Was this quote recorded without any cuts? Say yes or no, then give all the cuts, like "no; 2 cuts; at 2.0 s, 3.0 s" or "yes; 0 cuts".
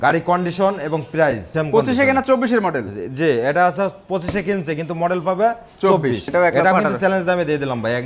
no; 2 cuts; at 1.4 s, 6.3 s